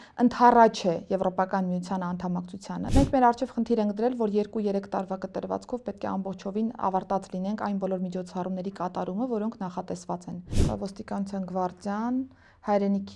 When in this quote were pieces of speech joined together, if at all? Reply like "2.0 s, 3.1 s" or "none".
2.9 s, 10.5 s